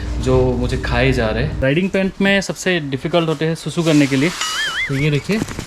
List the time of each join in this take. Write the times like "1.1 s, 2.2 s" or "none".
1.4 s